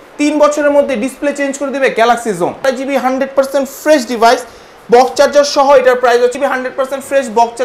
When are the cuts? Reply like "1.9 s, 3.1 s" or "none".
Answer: 2.6 s, 6.3 s